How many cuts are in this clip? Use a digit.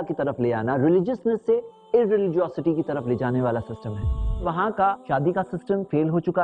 1